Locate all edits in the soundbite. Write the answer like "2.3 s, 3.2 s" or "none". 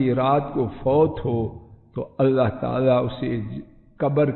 none